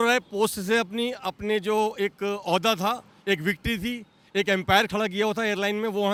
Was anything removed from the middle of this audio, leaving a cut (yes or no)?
no